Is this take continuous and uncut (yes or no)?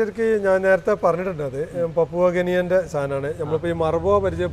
yes